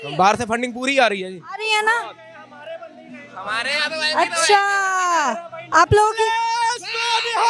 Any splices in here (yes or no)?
no